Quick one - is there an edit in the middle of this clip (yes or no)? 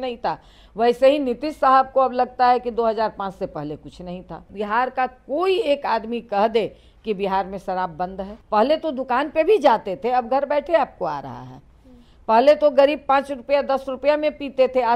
yes